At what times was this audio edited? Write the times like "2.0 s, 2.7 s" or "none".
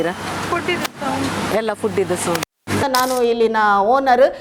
2.8 s